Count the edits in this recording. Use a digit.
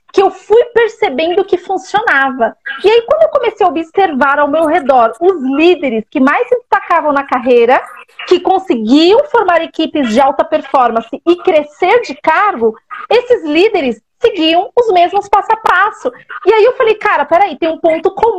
1